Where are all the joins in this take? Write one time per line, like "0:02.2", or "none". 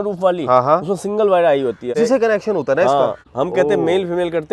0:01.9
0:03.2